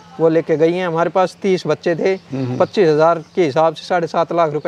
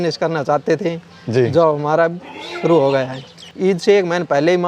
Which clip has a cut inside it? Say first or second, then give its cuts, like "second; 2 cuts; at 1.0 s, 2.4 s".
second; 1 cut; at 3.5 s